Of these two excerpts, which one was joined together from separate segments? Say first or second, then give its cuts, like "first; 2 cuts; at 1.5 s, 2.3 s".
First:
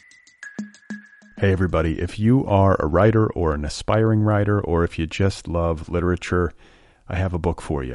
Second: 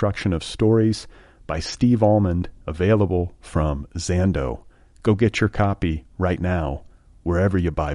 first; 1 cut; at 0.9 s